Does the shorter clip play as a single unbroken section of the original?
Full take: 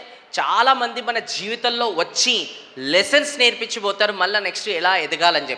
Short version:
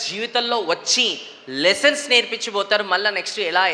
yes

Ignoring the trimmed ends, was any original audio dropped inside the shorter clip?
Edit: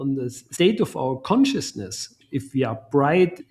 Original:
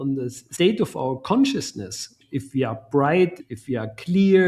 no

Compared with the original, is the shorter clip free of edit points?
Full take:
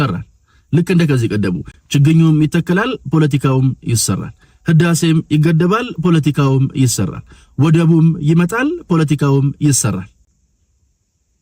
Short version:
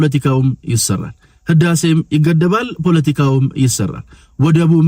yes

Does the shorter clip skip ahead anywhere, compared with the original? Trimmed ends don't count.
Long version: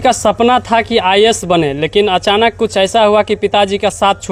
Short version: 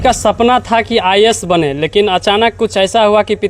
no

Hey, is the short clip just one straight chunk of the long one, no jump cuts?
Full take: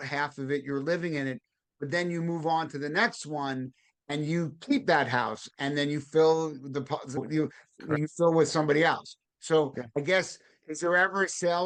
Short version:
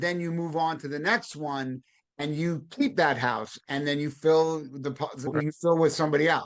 no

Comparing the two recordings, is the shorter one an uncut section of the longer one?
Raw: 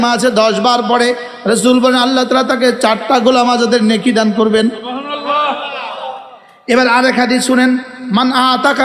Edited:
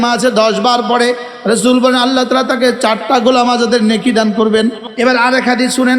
no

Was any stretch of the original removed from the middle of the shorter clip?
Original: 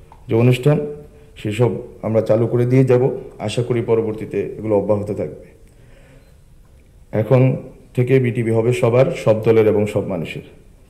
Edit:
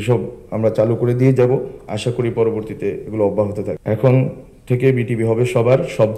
yes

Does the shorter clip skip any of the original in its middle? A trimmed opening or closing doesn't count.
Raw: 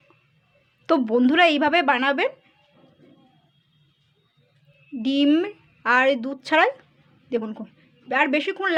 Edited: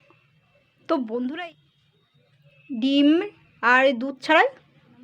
yes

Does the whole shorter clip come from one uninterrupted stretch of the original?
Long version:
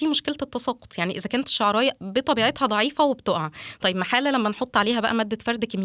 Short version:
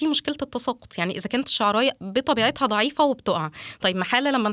yes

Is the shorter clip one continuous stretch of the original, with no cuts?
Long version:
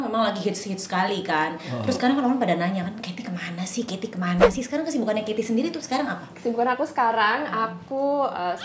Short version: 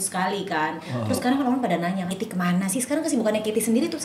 no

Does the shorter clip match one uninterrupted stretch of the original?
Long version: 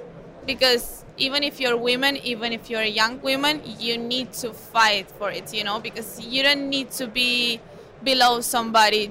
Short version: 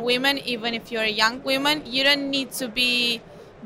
no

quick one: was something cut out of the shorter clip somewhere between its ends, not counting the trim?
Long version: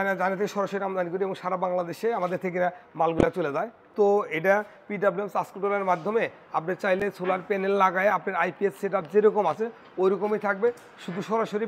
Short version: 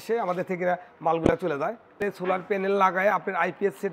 yes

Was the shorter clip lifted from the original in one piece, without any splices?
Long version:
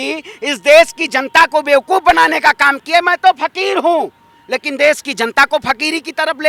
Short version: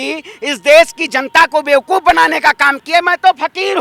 yes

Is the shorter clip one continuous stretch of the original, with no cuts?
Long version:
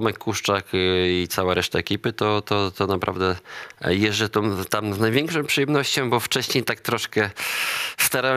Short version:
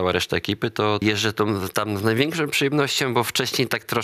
no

